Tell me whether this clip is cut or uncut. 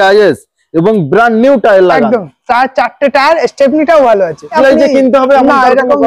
cut